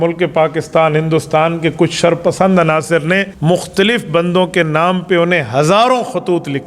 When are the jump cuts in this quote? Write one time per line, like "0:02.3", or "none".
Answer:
0:03.3